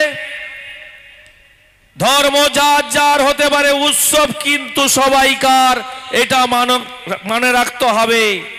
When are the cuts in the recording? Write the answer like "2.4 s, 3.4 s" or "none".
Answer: none